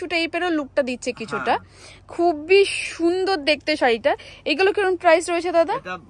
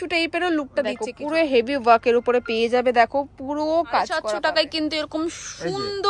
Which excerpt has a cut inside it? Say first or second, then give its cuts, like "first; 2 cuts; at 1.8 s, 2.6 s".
second; 2 cuts; at 1.1 s, 4.3 s